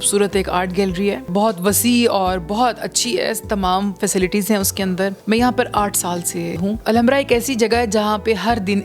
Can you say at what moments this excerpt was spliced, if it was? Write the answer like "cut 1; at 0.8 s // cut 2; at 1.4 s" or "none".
cut 1; at 1.3 s // cut 2; at 5.2 s // cut 3; at 6.7 s